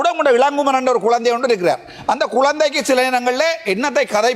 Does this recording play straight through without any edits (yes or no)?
yes